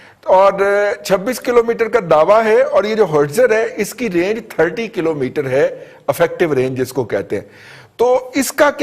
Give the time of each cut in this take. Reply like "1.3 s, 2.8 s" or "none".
none